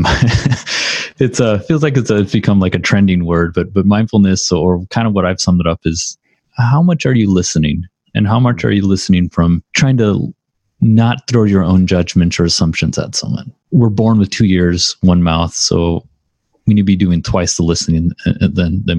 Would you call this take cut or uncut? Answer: cut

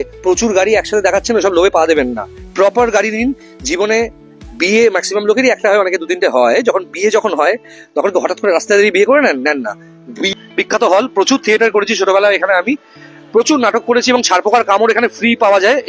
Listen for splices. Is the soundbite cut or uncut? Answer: cut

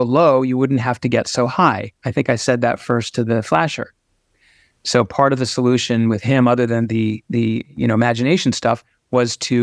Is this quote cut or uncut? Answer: uncut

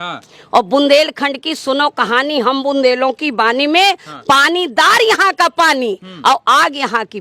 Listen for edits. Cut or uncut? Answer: uncut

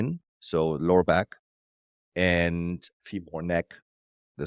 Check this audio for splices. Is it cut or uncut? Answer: cut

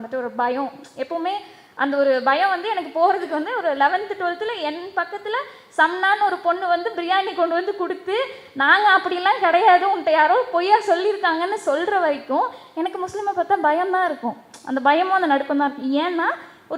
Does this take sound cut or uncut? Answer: uncut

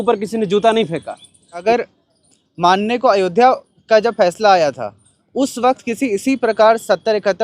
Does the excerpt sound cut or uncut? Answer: cut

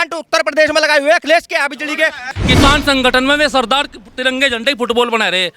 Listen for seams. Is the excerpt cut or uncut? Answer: cut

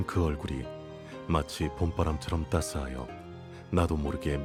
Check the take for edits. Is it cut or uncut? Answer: uncut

